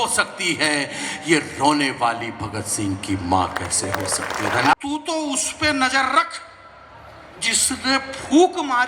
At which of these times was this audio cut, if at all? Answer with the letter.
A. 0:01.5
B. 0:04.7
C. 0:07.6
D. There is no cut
B